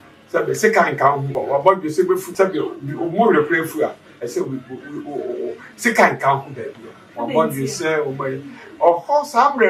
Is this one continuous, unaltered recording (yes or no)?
no